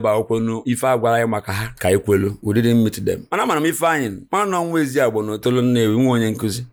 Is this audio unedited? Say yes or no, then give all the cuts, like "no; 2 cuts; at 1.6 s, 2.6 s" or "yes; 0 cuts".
yes; 0 cuts